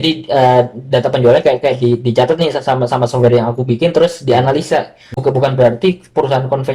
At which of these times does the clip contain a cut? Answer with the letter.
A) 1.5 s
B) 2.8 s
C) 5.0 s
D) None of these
C